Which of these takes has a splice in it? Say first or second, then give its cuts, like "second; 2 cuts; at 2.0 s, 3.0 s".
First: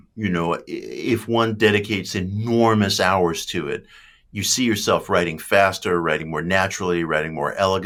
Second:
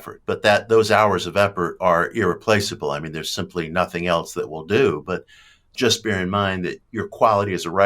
second; 1 cut; at 5.7 s